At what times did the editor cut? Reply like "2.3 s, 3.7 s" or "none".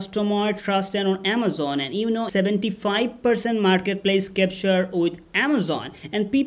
2.3 s